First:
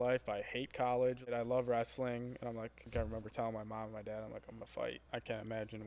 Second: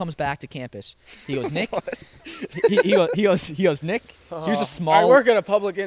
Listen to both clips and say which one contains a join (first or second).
first